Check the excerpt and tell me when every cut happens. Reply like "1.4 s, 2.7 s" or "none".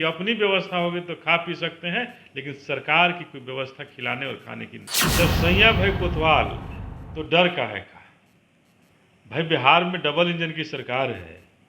4.8 s